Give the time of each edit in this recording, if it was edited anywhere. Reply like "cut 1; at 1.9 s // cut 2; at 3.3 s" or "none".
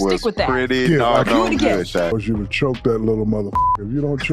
cut 1; at 2.1 s